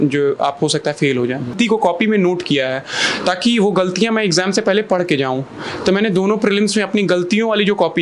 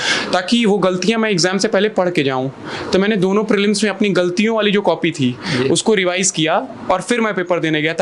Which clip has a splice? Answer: first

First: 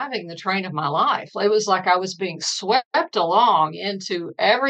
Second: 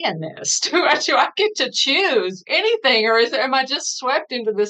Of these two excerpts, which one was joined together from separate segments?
second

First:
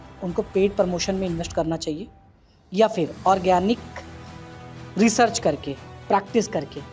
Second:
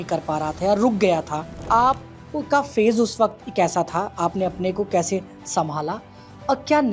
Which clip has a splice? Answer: second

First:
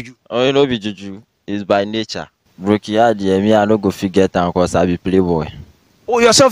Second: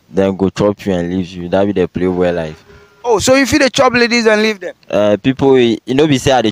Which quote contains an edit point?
first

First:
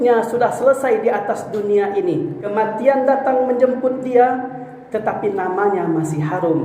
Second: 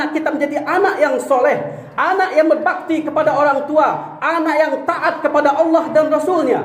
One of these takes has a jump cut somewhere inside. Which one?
first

